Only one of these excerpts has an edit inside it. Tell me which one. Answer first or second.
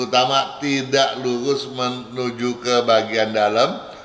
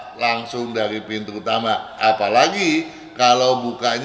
second